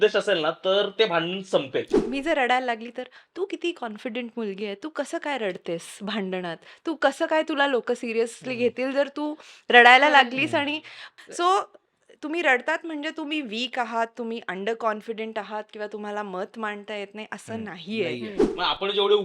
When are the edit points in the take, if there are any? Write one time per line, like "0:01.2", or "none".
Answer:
0:02.0
0:11.0
0:18.4